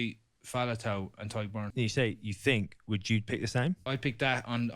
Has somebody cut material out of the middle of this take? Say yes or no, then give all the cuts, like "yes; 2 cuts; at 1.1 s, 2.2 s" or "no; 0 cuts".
yes; 2 cuts; at 1.7 s, 3.8 s